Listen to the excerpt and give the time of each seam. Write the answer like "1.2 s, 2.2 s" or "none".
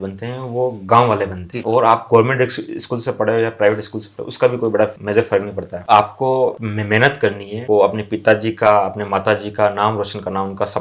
1.5 s, 5.7 s